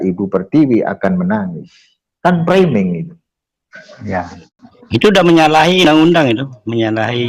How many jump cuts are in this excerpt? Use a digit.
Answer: 1